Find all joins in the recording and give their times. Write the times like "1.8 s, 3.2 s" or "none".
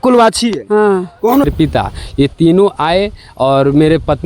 1.5 s